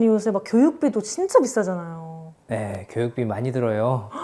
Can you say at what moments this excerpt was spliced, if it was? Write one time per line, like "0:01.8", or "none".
none